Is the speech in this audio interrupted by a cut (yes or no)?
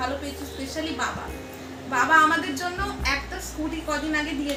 no